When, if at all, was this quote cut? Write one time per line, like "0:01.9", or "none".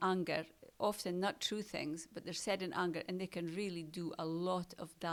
none

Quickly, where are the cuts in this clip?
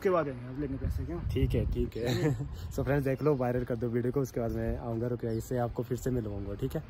none

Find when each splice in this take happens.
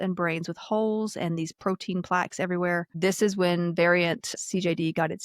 0:02.9
0:04.3

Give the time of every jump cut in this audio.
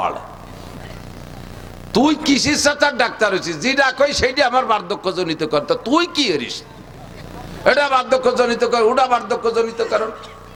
none

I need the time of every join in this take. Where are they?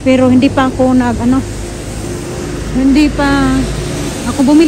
none

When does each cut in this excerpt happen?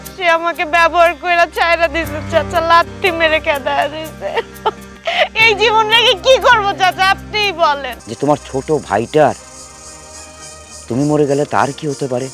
0:04.9
0:08.0

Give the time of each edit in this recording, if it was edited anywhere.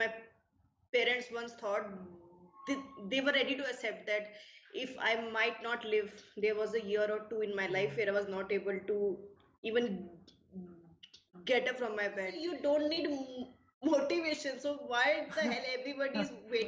0:12.4

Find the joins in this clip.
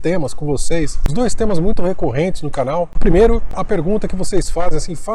0:01.0
0:02.9
0:03.6

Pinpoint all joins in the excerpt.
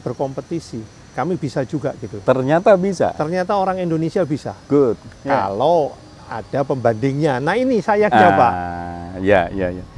none

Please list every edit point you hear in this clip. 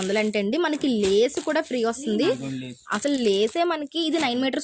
none

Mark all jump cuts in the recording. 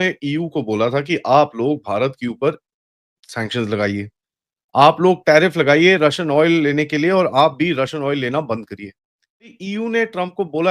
0:09.6

